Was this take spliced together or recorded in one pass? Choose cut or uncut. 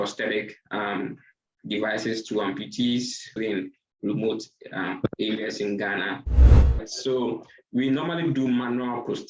cut